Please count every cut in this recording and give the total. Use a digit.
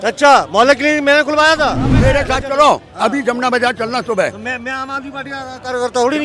1